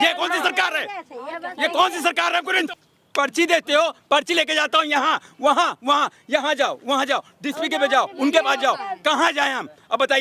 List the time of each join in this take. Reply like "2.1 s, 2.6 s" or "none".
2.6 s